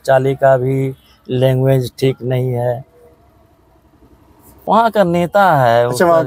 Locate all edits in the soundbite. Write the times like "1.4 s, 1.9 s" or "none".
5.0 s